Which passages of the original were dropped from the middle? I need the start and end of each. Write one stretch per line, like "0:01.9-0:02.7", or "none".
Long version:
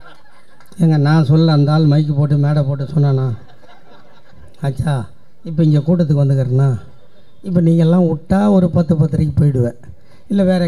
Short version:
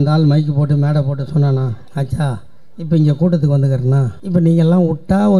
0:03.4-0:04.5
0:06.8-0:07.4